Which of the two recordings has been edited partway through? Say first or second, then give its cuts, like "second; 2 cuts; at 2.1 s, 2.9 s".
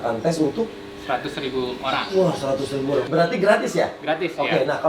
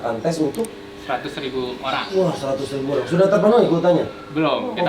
first; 1 cut; at 3.1 s